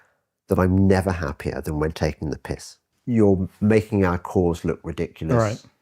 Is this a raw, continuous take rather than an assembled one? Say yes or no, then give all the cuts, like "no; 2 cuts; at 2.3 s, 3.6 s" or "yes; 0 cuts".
no; 1 cut; at 2.9 s